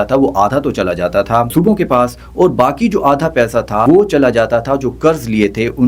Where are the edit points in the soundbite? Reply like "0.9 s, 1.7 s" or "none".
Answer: 1.5 s, 3.8 s